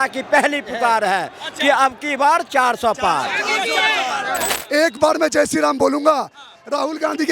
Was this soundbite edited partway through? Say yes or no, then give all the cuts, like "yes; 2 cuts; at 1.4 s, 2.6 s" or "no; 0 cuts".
yes; 1 cut; at 4.5 s